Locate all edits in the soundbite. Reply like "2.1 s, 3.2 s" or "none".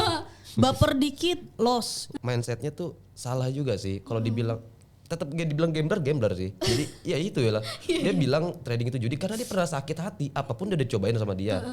2.1 s